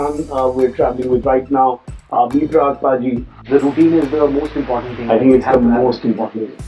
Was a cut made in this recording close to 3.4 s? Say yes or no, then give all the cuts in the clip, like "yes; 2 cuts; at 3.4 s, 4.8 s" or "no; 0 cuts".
yes; 1 cut; at 3.4 s